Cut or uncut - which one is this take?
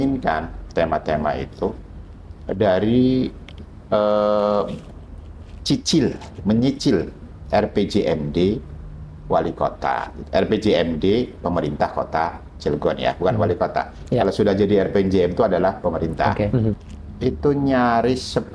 cut